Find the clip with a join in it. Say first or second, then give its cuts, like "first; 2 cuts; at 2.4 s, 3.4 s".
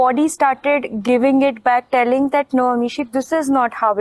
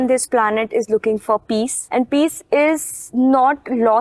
second; 1 cut; at 1.8 s